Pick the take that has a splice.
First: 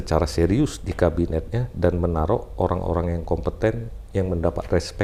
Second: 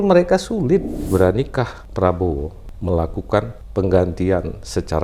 second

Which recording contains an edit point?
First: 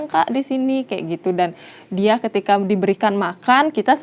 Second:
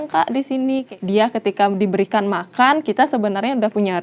second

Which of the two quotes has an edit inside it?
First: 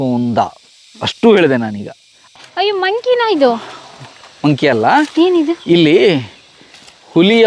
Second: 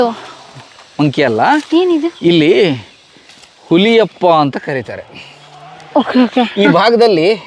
first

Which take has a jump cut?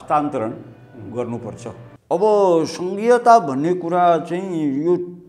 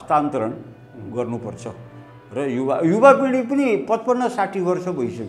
first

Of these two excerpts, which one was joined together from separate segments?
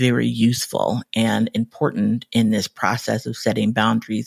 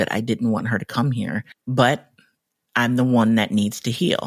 second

